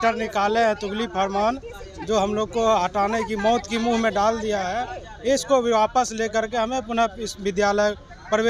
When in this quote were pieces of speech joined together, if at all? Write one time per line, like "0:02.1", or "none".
none